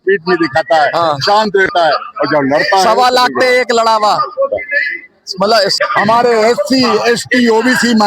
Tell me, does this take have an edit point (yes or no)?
yes